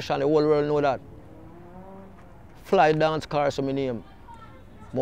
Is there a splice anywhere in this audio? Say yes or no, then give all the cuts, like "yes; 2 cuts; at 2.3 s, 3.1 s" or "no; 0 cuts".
no; 0 cuts